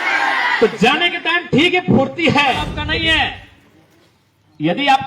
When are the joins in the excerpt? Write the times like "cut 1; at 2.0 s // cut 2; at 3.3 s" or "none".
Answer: cut 1; at 2.8 s